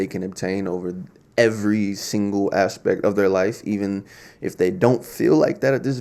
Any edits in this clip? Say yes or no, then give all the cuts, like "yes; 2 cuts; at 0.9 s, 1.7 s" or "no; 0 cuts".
no; 0 cuts